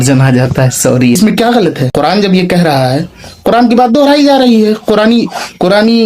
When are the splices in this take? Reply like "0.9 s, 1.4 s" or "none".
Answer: 1.2 s